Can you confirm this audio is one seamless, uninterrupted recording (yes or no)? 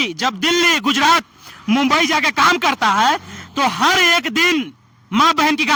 yes